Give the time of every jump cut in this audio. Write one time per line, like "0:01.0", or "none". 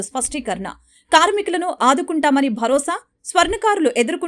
none